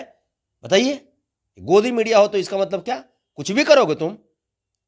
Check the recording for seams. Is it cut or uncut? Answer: uncut